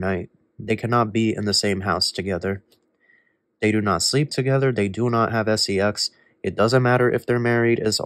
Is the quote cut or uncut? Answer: uncut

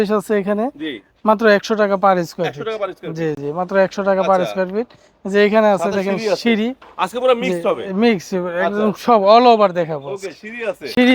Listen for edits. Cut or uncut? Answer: uncut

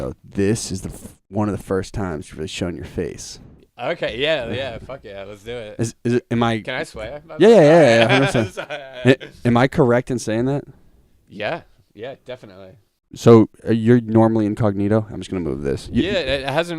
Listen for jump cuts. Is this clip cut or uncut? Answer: uncut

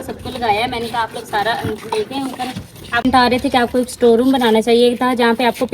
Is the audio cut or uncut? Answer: cut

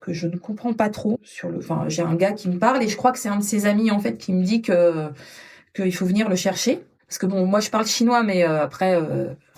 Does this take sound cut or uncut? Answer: cut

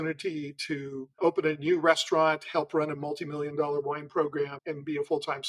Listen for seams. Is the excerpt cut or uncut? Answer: cut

